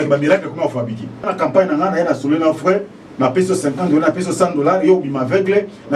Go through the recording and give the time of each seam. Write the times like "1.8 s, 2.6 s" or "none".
1.3 s